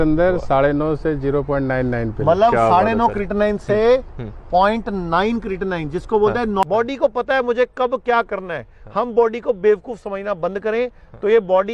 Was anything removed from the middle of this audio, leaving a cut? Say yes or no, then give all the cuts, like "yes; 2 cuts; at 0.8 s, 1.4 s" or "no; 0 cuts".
yes; 1 cut; at 6.6 s